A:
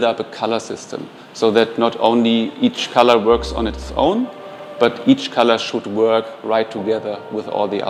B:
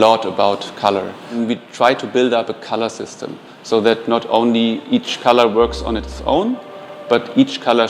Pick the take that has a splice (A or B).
B